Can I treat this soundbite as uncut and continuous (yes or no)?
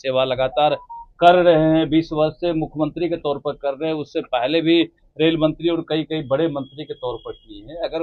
yes